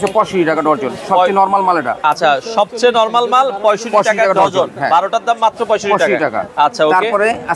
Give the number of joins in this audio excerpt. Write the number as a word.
zero